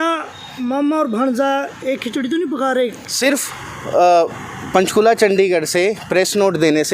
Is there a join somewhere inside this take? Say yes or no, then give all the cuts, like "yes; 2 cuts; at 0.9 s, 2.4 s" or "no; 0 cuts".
yes; 1 cut; at 3.0 s